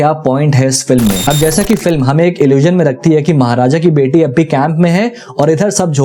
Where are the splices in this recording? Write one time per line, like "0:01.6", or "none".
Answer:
0:01.2